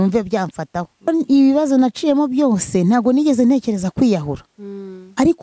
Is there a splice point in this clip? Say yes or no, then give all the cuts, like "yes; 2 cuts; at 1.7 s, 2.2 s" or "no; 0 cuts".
yes; 1 cut; at 1.1 s